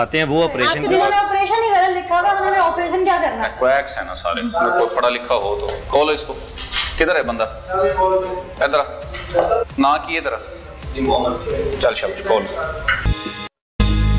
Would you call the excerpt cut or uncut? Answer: cut